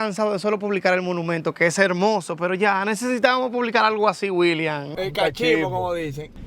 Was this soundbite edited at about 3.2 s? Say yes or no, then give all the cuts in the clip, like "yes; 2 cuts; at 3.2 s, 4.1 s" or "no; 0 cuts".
no; 1 cut; at 4.9 s